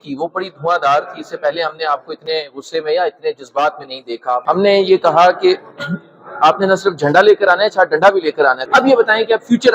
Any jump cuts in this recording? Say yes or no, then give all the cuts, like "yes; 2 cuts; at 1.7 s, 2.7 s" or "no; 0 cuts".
yes; 2 cuts; at 4.4 s, 8.6 s